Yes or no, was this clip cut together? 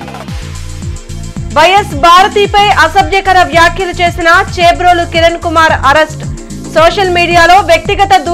yes